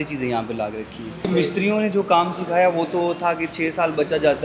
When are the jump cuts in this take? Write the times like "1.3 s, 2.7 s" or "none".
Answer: 1.2 s